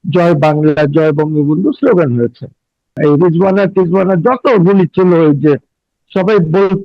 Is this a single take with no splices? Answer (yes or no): no